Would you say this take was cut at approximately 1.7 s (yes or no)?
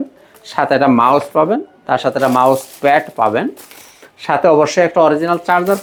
no